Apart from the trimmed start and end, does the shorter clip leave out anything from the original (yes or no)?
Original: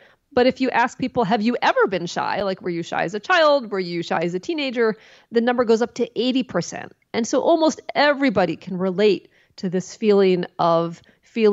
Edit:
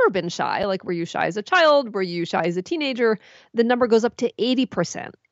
no